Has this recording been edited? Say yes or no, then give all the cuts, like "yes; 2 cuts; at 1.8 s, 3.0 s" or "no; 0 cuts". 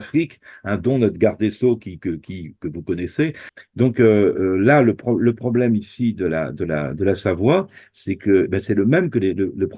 yes; 1 cut; at 3.5 s